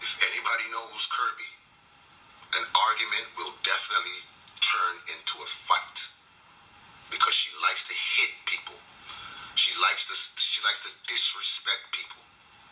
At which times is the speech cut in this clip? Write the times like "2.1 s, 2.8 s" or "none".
none